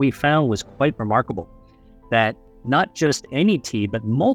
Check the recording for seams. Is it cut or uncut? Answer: uncut